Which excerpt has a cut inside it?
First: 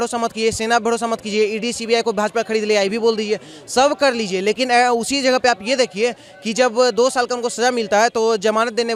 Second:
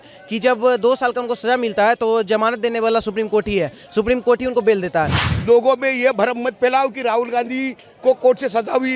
second; 1 cut; at 5.2 s

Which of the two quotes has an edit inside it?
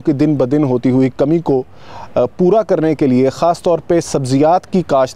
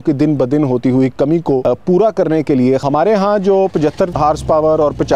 second; 3 cuts; at 1.6 s, 2.8 s, 4.1 s

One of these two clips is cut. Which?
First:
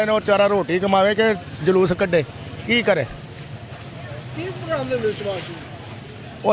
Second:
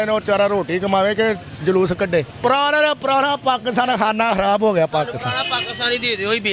second; 1 cut; at 2.3 s

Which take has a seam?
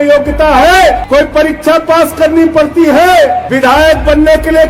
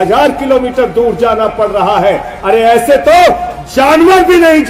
first; 2 cuts; at 1.0 s, 3.5 s

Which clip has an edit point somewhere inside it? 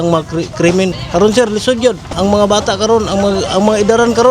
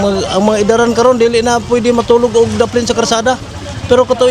first; 2 cuts; at 1.0 s, 2.1 s

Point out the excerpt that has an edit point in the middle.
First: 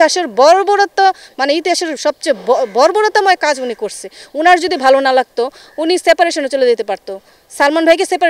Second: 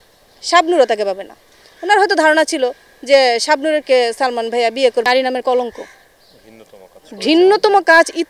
second; 1 cut; at 5.0 s

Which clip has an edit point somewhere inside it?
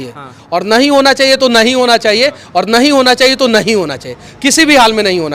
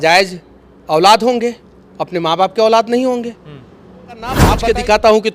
second; 1 cut; at 4.4 s

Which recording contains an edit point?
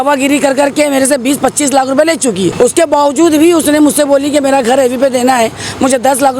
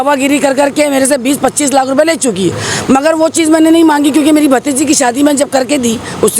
first; 1 cut; at 2.5 s

